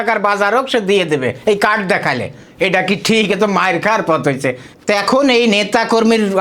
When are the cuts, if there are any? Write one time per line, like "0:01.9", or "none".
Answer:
0:04.7